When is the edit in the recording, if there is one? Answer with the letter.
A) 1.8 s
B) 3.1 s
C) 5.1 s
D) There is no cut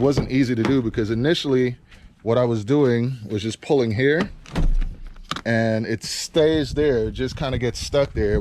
D